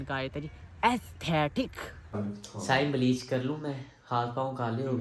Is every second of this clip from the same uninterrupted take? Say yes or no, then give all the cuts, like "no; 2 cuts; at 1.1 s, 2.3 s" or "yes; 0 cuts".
no; 1 cut; at 2.1 s